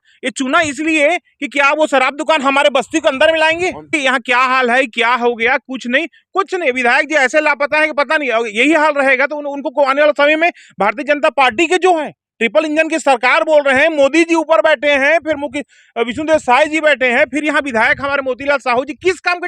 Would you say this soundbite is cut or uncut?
cut